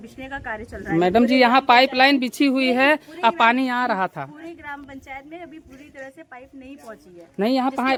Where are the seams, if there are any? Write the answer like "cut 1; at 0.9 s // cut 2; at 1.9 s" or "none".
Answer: none